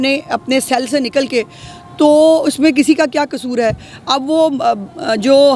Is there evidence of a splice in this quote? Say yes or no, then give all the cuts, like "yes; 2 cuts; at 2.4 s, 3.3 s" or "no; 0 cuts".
no; 0 cuts